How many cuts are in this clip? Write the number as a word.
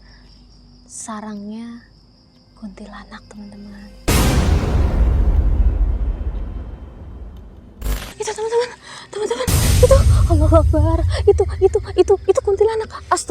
one